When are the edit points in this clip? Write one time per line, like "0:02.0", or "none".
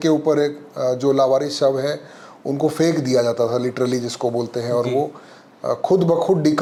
none